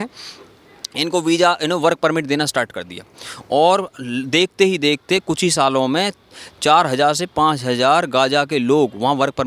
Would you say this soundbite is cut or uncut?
uncut